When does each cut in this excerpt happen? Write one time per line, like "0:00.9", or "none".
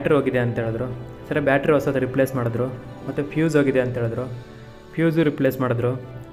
none